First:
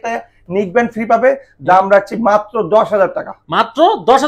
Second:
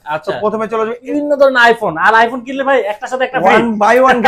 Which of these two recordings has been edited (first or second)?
second